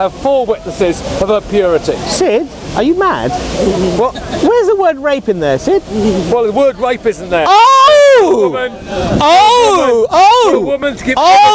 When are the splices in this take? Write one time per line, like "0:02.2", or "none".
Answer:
none